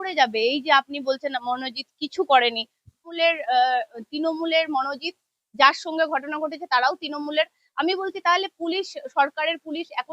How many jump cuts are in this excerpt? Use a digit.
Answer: 1